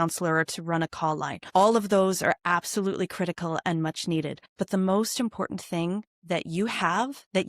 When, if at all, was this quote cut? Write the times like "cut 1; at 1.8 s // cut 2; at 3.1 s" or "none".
cut 1; at 1.4 s // cut 2; at 4.4 s